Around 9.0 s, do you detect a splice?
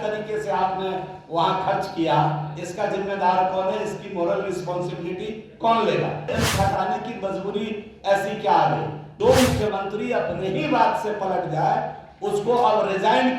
yes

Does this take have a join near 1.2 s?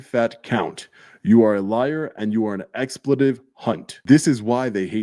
no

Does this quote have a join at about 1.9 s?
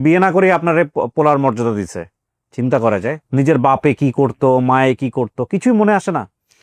no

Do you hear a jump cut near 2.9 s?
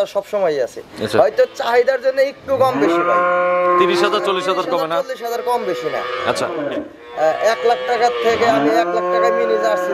no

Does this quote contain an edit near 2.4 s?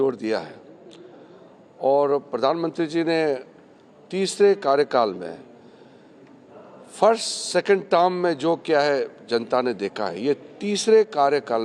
yes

